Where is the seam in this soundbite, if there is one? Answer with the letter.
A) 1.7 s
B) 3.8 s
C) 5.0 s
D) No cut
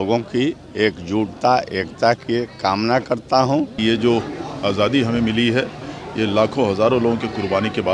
B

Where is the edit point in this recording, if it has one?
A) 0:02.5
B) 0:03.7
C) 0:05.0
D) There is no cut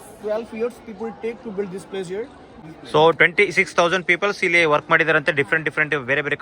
A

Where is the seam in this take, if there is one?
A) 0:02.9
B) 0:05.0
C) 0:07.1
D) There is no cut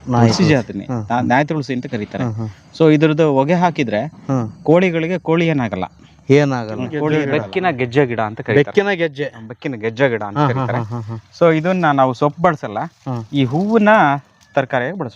C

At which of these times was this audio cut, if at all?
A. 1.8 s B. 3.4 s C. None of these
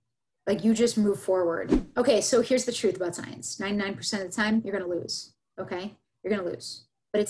A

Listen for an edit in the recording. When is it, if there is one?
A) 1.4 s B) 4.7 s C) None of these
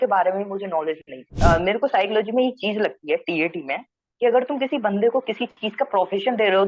A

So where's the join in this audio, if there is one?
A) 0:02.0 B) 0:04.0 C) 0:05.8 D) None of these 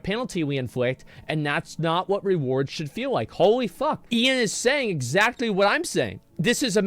B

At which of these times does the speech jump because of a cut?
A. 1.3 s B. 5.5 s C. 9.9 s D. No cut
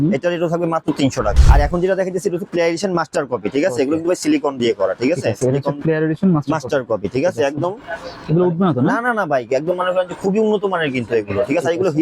A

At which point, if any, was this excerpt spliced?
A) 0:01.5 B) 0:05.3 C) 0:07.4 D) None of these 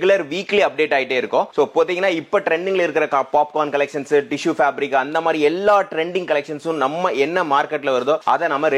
D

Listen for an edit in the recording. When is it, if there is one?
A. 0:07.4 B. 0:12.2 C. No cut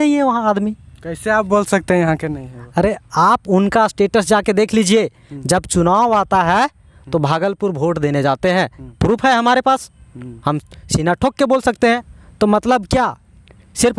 B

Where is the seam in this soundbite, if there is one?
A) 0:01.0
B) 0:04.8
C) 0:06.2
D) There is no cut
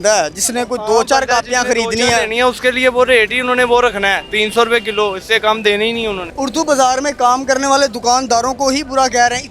C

